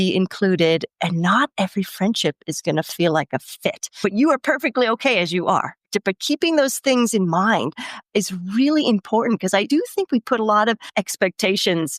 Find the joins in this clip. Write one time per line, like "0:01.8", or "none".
0:09.6
0:10.8